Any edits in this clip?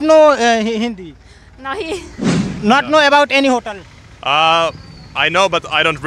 yes; 1 cut; at 2.6 s

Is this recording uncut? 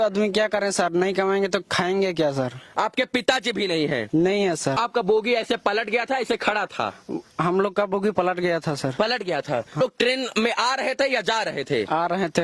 no; 2 cuts; at 4.8 s, 9.8 s

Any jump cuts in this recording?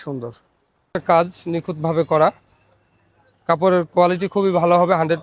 yes; 1 cut; at 0.9 s

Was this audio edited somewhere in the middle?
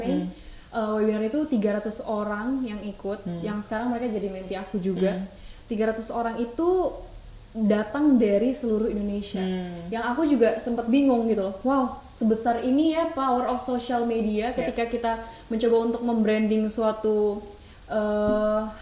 no; 0 cuts

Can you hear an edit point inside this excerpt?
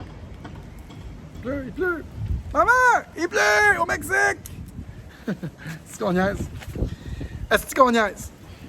no; 0 cuts

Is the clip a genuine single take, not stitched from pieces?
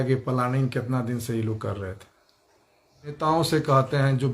no; 1 cut; at 3.2 s

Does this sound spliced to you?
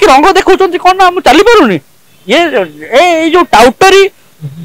no; 0 cuts

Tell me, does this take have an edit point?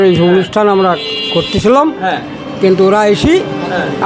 no; 0 cuts

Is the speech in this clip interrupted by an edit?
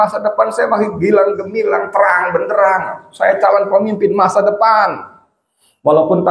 no; 0 cuts

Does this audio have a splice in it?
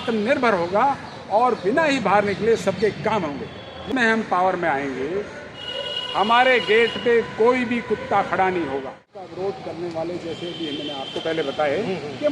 yes; 2 cuts; at 3.9 s, 9.1 s

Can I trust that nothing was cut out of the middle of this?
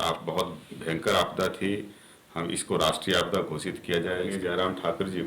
no; 1 cut; at 4.3 s

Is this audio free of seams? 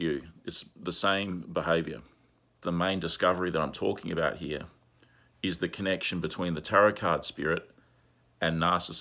no; 1 cut; at 2.6 s

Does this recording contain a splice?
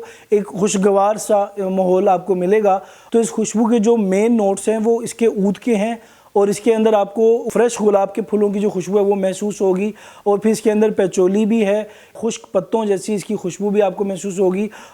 yes; 3 cuts; at 2.9 s, 7.5 s, 12.2 s

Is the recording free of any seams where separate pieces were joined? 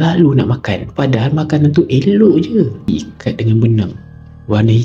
no; 1 cut; at 2.8 s

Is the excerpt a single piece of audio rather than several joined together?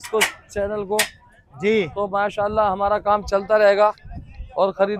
yes; 0 cuts

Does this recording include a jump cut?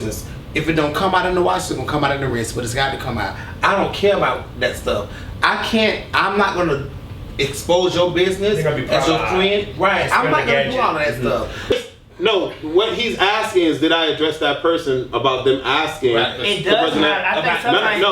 yes; 1 cut; at 11.7 s

